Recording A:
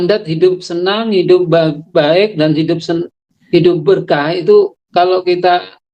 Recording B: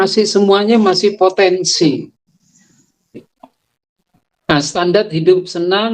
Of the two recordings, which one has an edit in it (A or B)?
B